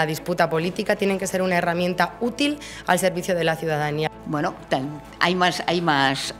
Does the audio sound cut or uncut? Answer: cut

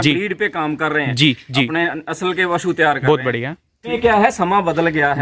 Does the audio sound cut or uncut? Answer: cut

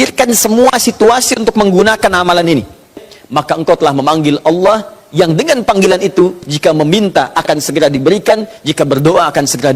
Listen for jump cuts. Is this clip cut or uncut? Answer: cut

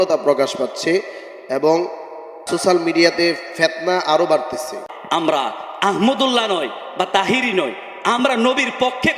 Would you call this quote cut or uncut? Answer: cut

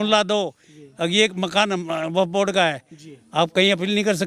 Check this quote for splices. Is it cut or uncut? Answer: uncut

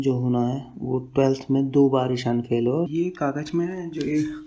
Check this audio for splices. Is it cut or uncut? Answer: cut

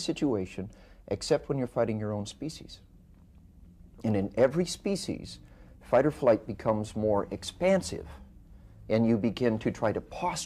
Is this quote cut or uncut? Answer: uncut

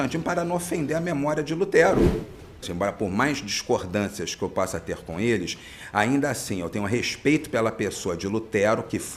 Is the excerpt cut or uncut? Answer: cut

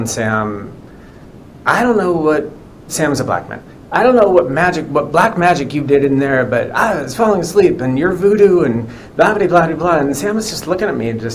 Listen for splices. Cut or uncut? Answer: uncut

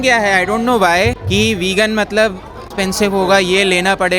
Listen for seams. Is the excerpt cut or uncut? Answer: cut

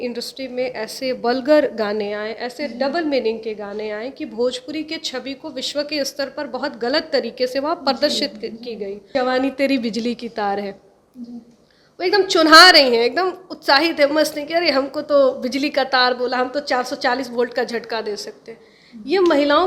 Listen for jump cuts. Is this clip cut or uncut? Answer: cut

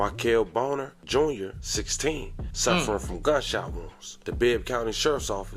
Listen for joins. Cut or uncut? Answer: uncut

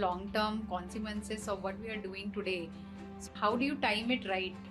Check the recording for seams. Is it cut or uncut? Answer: cut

